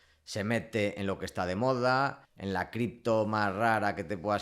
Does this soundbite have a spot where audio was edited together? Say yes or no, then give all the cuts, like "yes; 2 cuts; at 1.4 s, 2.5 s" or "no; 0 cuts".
yes; 1 cut; at 2.3 s